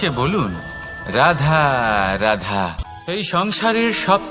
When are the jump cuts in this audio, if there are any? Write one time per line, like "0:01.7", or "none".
0:02.9